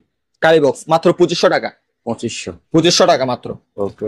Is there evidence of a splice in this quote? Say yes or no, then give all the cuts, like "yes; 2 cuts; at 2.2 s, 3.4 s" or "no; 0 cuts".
no; 0 cuts